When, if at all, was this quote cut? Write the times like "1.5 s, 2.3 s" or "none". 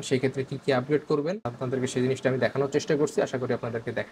1.5 s